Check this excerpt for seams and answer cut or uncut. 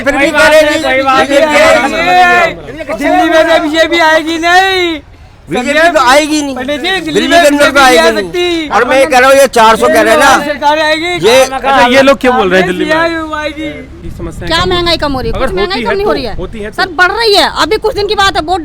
cut